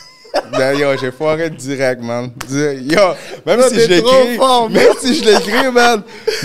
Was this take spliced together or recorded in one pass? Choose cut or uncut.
uncut